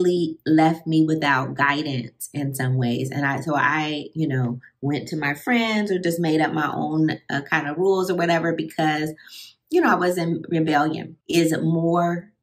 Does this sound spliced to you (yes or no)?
yes